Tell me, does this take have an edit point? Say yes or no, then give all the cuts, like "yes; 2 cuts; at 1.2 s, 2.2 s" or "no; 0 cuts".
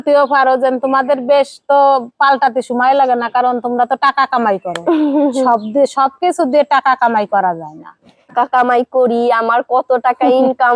yes; 1 cut; at 8.3 s